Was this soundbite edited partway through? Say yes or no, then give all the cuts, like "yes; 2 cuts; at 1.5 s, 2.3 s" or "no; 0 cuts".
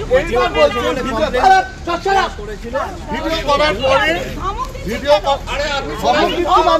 no; 0 cuts